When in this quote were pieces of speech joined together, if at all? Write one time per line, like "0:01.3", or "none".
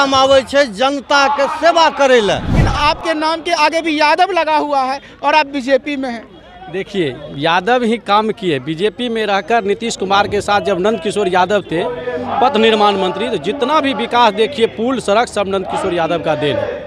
0:02.6